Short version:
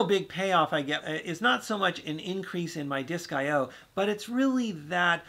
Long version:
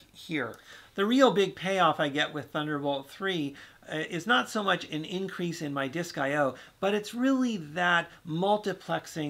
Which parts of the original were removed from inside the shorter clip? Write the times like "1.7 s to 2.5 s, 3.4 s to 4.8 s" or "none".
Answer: 2.3 s to 3.9 s